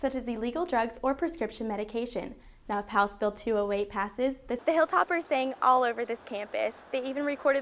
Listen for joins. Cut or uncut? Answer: cut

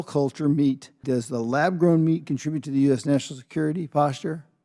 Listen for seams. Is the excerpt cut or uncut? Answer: cut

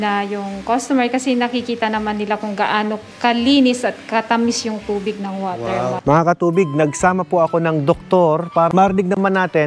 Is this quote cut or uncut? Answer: cut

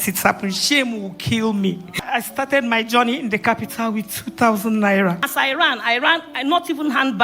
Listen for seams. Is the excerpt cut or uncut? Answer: cut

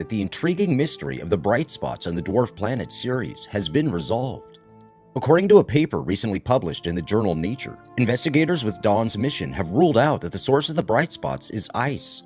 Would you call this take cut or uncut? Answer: cut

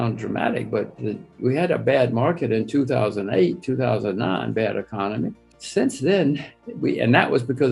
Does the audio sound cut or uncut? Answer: uncut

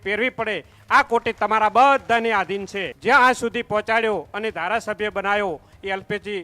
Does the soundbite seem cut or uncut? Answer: cut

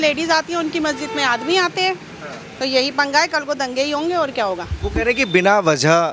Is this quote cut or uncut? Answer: uncut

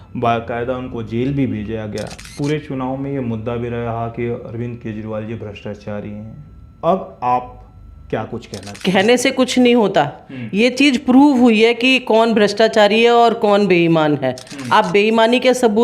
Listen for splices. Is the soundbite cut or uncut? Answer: cut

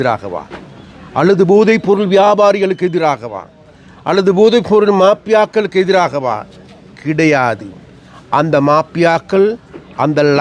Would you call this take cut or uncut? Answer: uncut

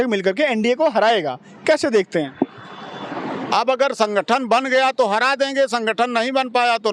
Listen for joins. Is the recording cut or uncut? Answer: uncut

